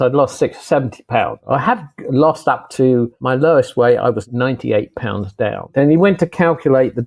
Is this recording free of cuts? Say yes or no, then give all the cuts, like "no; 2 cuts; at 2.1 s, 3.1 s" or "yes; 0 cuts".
no; 4 cuts; at 1.4 s, 3.2 s, 4.2 s, 5.7 s